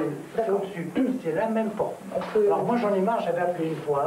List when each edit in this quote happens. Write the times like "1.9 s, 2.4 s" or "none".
none